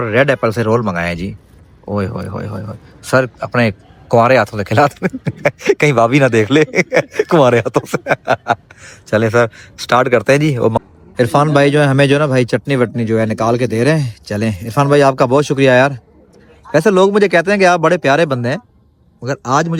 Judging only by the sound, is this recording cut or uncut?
uncut